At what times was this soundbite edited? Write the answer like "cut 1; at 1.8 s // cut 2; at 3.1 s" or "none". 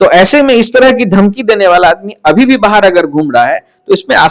none

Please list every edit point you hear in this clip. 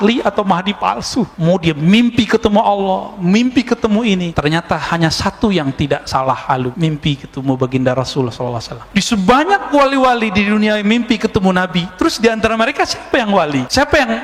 none

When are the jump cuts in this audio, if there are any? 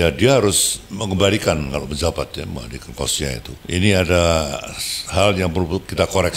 cut 1; at 3.5 s

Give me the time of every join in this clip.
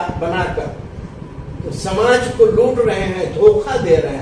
none

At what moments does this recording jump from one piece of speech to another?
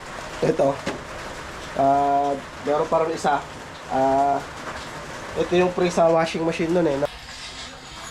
cut 1; at 7.1 s

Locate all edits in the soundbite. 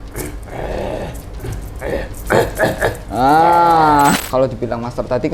cut 1; at 4.2 s

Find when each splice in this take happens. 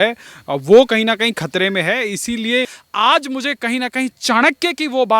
cut 1; at 2.8 s

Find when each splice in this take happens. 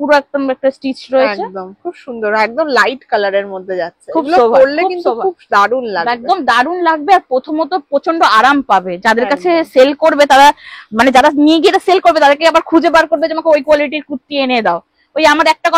none

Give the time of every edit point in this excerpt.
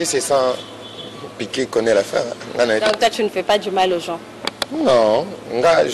none

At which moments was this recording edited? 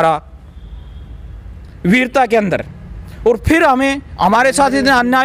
none

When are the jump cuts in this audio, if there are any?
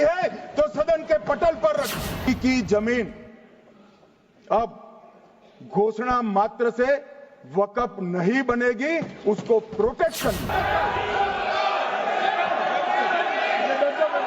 cut 1; at 2.2 s // cut 2; at 10.4 s

